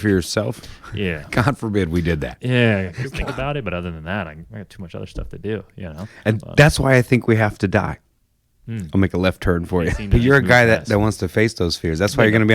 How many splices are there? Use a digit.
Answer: 2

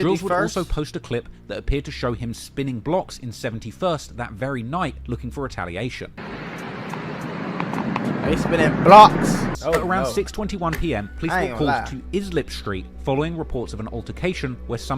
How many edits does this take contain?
1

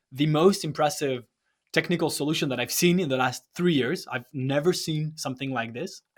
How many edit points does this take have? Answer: 0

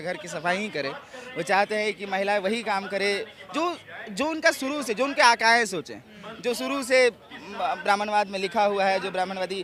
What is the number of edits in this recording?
0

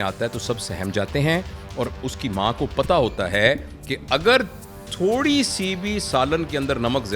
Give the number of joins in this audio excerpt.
0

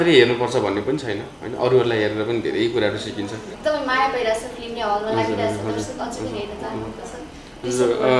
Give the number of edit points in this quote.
1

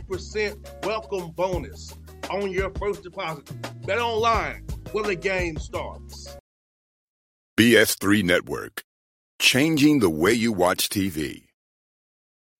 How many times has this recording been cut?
1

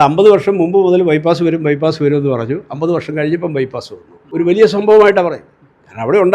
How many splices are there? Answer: 1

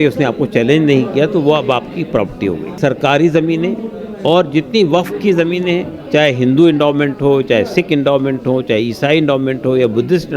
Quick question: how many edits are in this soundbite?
1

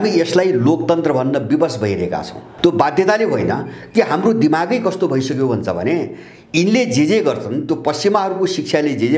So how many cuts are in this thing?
1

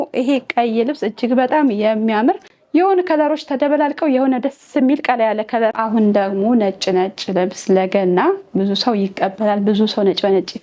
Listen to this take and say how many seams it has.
2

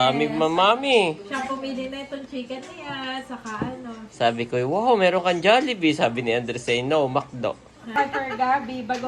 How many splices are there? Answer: 1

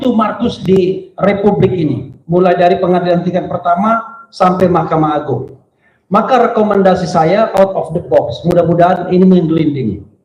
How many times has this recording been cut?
0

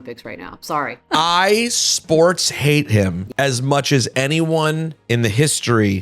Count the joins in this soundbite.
3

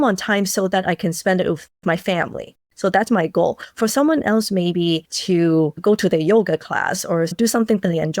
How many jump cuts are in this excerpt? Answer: 3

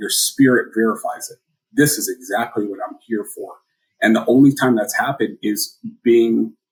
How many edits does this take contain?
0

